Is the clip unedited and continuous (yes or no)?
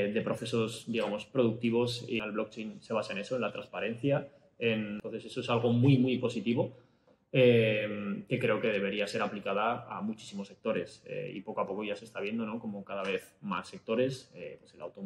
no